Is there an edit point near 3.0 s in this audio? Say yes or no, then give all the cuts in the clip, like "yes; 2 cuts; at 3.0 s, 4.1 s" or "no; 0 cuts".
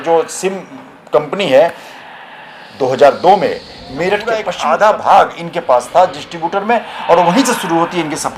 no; 1 cut; at 4.5 s